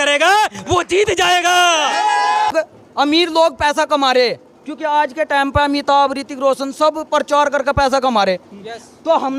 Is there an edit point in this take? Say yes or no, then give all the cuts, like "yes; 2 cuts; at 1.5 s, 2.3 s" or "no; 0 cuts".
yes; 1 cut; at 2.5 s